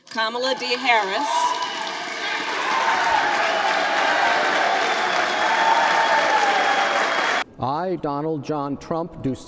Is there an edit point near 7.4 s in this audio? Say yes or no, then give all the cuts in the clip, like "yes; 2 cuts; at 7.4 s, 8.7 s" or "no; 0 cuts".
yes; 1 cut; at 7.4 s